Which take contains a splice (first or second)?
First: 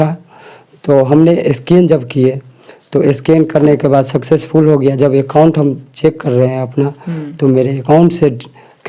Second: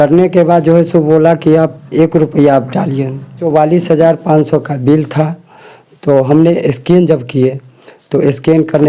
second